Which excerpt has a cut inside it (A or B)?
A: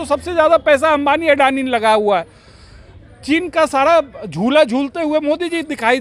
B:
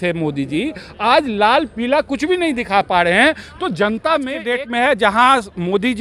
B